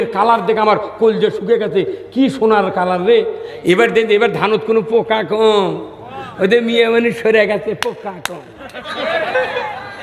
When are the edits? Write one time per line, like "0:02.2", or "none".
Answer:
none